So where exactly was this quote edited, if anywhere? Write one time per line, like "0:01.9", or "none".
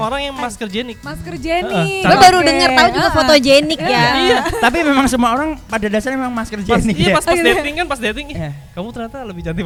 none